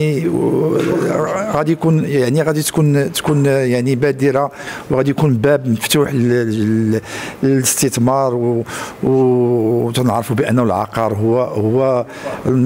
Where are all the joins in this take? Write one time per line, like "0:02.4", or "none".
none